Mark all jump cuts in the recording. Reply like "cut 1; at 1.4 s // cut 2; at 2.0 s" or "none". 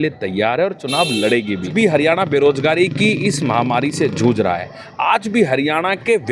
cut 1; at 1.7 s